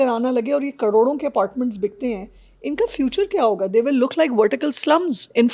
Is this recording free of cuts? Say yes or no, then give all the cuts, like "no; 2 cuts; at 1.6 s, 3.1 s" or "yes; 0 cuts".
yes; 0 cuts